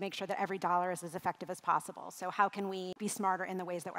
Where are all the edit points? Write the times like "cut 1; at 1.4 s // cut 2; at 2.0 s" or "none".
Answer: cut 1; at 2.9 s